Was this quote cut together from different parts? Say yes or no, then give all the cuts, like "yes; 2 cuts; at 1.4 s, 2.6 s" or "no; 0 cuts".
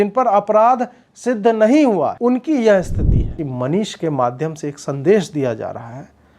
yes; 2 cuts; at 2.2 s, 3.3 s